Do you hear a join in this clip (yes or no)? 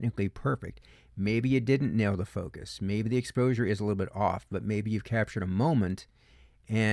no